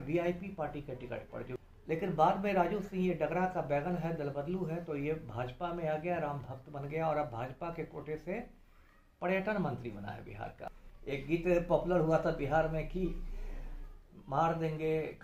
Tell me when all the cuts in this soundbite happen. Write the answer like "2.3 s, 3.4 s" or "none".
1.6 s, 10.6 s